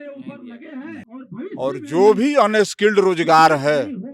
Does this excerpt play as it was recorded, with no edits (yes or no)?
no